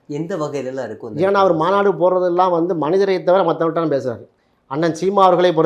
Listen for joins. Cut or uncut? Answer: uncut